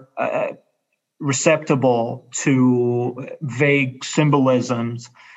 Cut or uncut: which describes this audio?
uncut